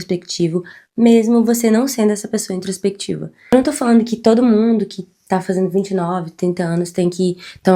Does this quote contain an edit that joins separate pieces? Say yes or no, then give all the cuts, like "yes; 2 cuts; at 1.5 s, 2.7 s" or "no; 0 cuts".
yes; 1 cut; at 3.3 s